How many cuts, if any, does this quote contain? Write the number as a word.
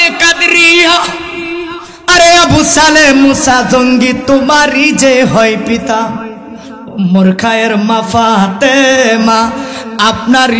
zero